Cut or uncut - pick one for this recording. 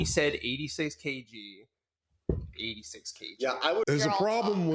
cut